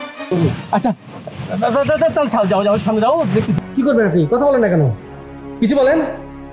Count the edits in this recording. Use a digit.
1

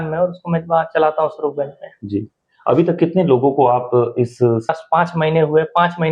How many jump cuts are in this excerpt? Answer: 1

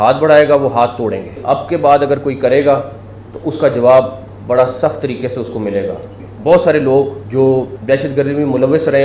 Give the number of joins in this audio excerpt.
4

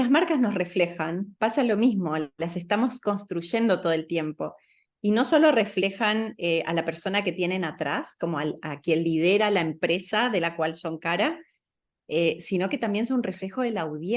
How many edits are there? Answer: 0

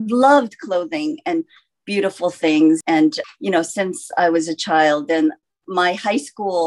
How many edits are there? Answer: 1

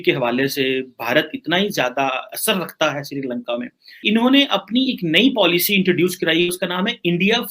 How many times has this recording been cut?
1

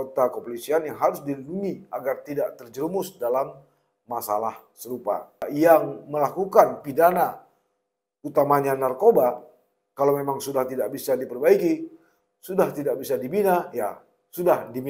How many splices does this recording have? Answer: 1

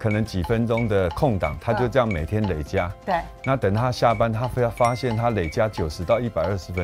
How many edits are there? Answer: 0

